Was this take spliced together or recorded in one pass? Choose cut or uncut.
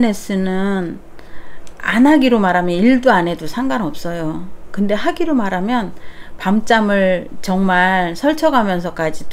uncut